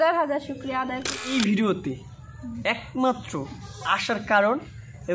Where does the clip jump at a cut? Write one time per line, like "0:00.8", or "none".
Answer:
0:01.2